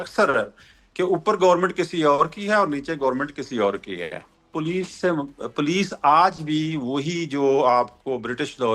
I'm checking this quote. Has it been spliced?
yes; 1 cut; at 4.5 s

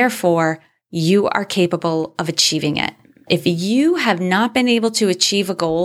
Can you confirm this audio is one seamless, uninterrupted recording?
no; 1 cut; at 3.2 s

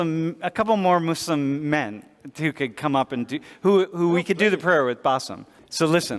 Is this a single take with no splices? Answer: yes; 0 cuts

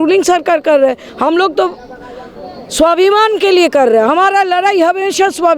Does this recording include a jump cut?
no; 0 cuts

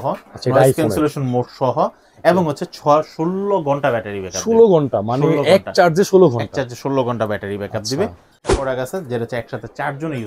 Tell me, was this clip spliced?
yes; 1 cut; at 8.5 s

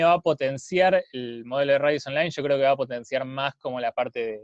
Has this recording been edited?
no; 0 cuts

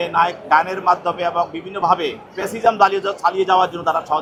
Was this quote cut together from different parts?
no; 0 cuts

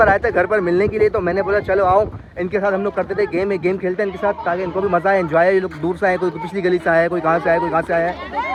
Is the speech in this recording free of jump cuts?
yes; 0 cuts

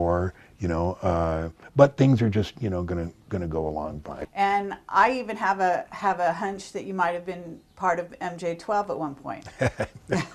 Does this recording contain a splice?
yes; 1 cut; at 4.1 s

